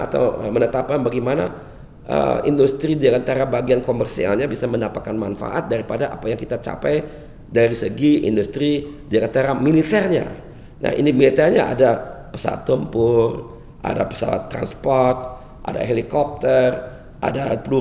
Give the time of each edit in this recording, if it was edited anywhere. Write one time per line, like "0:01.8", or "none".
none